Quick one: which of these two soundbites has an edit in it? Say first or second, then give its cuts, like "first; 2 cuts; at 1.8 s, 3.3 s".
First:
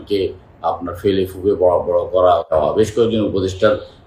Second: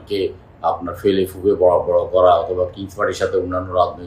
first; 1 cut; at 2.5 s